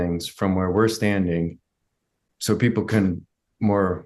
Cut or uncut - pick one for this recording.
cut